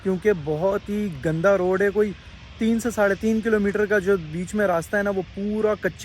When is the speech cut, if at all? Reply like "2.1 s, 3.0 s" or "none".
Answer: none